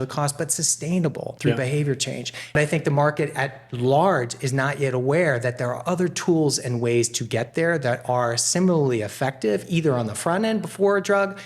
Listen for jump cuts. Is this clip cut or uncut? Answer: cut